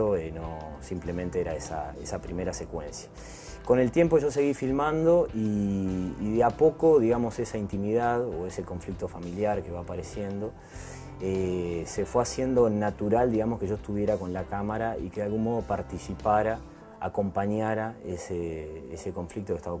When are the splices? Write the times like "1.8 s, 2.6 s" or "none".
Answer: none